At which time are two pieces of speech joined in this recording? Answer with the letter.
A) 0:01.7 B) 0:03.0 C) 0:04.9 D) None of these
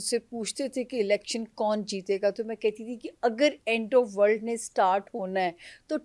D